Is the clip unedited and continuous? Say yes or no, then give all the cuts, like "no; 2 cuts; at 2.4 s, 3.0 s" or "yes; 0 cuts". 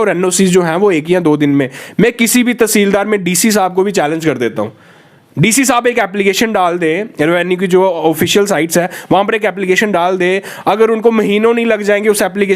yes; 0 cuts